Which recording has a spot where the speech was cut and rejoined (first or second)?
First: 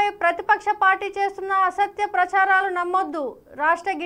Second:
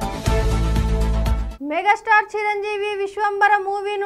second